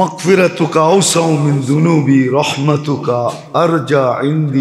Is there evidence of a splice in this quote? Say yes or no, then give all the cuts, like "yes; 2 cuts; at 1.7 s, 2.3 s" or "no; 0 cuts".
no; 0 cuts